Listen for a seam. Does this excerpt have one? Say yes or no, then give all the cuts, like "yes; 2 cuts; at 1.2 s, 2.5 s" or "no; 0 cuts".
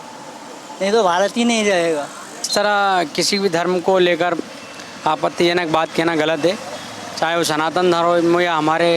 yes; 1 cut; at 2.4 s